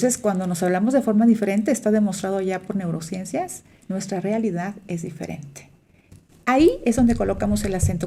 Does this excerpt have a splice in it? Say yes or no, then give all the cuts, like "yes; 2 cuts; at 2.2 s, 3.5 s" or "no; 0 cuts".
no; 0 cuts